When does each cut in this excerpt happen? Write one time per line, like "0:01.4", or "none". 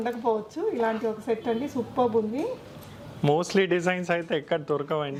none